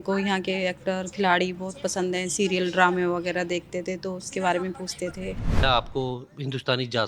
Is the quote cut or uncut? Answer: cut